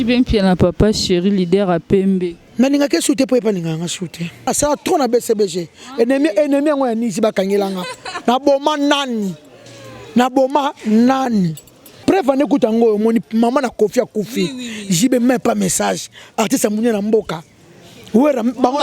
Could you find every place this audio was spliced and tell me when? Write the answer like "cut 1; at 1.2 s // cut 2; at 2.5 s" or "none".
cut 1; at 4.5 s // cut 2; at 11.9 s